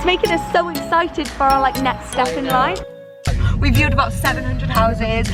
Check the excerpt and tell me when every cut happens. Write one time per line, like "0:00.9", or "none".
0:03.3